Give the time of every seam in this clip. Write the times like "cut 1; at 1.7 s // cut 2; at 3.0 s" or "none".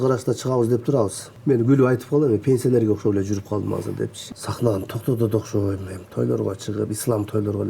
cut 1; at 1.3 s // cut 2; at 4.2 s